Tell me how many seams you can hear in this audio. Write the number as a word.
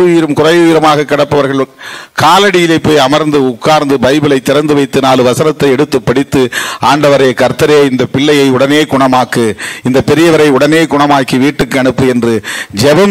zero